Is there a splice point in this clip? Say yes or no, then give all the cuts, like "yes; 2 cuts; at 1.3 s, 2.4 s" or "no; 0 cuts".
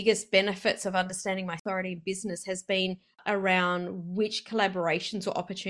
yes; 2 cuts; at 1.6 s, 3.2 s